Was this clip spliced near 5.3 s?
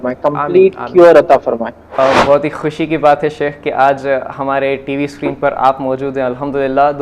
no; 1 cut; at 2.0 s

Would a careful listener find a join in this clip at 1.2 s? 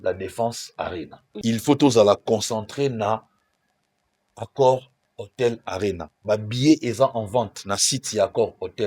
yes; 1 cut; at 1.2 s

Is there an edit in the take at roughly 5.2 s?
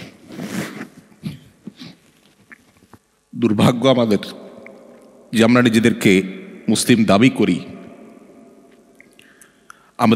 no; 1 cut; at 3.1 s

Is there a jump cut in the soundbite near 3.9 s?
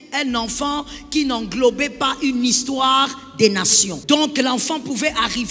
yes; 1 cut; at 3.9 s

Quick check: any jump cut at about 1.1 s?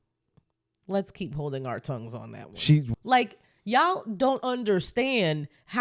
no; 1 cut; at 2.9 s

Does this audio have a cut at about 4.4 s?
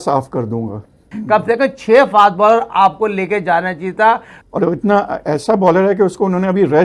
yes; 2 cuts; at 1.1 s, 4.4 s

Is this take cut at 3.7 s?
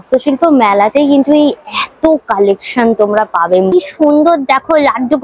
yes; 1 cut; at 3.7 s

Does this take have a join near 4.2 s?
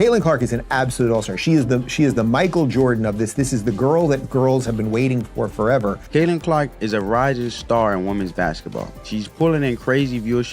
no; 2 cuts; at 6.0 s, 9.0 s

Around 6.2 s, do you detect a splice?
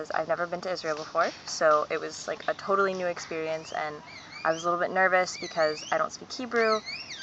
no; 1 cut; at 1.1 s

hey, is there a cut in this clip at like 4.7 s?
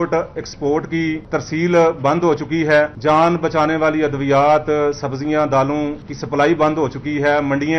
no; 3 cuts; at 1.2 s, 3.0 s, 6.1 s

